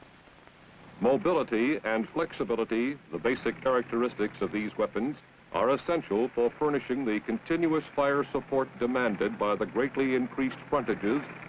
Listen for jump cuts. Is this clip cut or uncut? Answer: cut